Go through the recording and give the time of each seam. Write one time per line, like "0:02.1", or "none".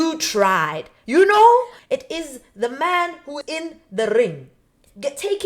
0:01.8